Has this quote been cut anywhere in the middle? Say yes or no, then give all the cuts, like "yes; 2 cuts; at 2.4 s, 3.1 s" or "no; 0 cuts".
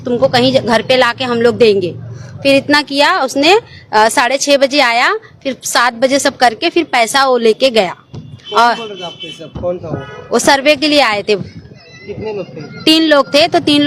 no; 0 cuts